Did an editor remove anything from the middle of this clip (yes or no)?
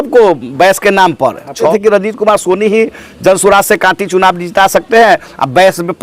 yes